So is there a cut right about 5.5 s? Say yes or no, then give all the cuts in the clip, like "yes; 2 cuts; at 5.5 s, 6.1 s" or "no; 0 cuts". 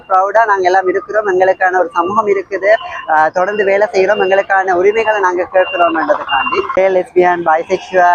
no; 1 cut; at 6.8 s